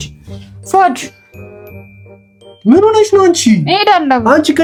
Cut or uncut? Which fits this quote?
uncut